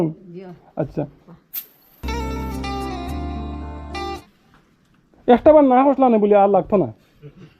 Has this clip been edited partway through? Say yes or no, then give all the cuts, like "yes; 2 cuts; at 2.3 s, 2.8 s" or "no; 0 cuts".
yes; 1 cut; at 4.2 s